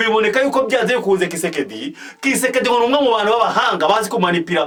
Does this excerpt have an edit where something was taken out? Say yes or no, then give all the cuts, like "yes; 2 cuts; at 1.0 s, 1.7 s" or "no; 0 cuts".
no; 0 cuts